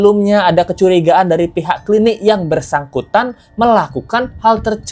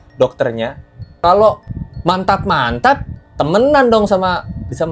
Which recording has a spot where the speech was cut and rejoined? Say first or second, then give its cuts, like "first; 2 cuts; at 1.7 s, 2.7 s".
second; 1 cut; at 1.2 s